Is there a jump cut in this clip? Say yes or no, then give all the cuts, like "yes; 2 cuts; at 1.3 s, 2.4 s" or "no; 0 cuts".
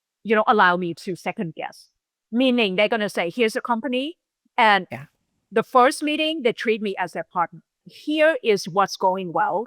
yes; 1 cut; at 7.9 s